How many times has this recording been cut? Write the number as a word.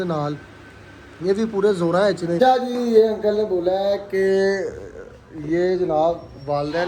one